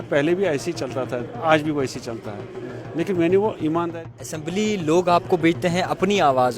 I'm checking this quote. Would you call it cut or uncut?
cut